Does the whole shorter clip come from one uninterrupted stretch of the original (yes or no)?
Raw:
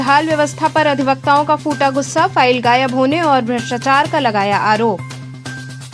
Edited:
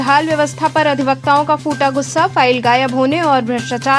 yes